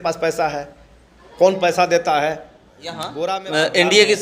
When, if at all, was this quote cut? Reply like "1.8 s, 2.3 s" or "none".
3.1 s